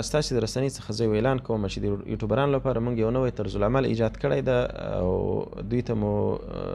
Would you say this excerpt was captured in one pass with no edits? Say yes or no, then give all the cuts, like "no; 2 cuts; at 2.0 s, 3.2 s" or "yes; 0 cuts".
yes; 0 cuts